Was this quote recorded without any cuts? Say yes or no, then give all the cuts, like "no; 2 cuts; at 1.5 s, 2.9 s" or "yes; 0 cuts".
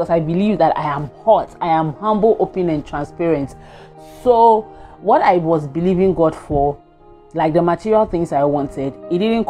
yes; 0 cuts